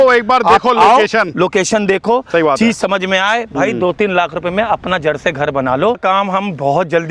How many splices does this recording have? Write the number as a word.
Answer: one